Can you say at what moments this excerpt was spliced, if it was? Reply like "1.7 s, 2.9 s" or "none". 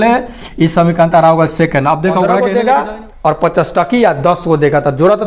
2.4 s

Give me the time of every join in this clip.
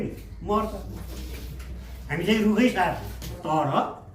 3.3 s

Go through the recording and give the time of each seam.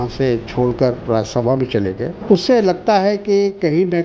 2.1 s

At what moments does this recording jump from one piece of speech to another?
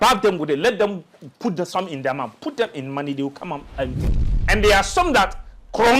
4.3 s

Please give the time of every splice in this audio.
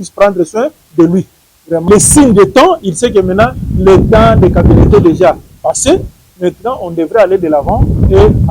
1.8 s

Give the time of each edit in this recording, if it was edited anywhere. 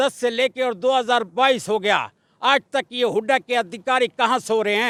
none

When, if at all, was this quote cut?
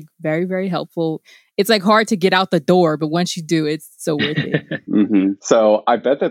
5.4 s

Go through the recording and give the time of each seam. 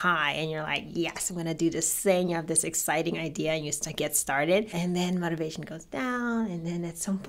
4.8 s

